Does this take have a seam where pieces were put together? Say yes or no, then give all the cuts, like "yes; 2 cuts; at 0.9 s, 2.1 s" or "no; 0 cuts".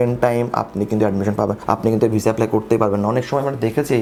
no; 0 cuts